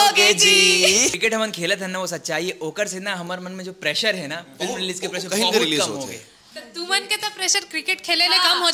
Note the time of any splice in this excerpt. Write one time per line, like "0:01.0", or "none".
0:01.2